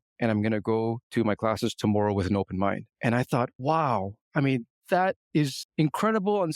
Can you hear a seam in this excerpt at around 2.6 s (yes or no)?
no